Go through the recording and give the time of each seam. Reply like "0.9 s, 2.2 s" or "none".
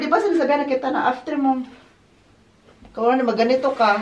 none